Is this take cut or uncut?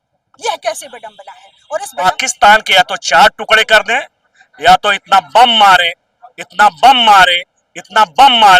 cut